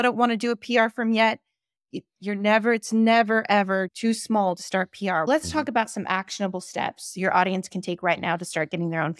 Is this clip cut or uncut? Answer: cut